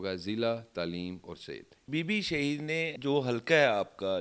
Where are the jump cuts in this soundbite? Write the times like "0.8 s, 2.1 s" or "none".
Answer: 1.8 s, 2.9 s